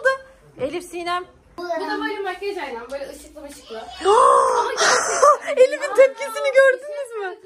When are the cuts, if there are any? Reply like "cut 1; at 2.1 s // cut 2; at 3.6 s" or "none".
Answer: cut 1; at 1.6 s